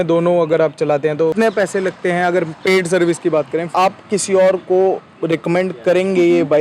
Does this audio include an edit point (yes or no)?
yes